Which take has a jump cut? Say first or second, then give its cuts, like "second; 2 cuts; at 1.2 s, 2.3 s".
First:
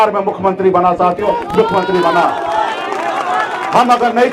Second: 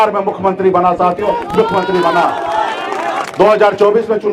second; 1 cut; at 3.2 s